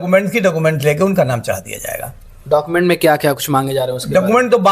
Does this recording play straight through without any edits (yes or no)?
yes